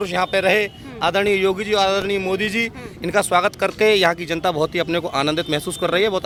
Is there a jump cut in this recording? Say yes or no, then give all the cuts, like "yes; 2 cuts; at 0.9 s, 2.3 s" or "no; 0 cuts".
no; 0 cuts